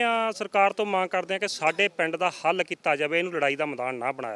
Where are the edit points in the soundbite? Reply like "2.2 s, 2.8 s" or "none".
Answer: none